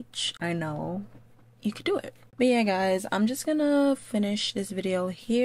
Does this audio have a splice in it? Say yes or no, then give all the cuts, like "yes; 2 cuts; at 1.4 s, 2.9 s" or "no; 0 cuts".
no; 0 cuts